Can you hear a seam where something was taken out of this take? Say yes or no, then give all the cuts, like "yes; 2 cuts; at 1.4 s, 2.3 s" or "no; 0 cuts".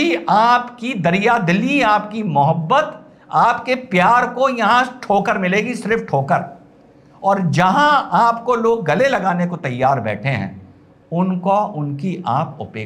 no; 0 cuts